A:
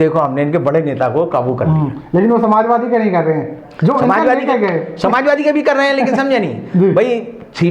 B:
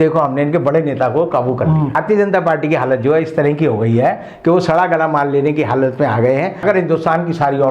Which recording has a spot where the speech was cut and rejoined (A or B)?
B